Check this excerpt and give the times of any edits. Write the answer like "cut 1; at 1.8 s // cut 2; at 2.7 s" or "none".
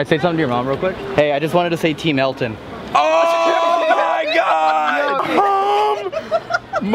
cut 1; at 1.1 s // cut 2; at 5.2 s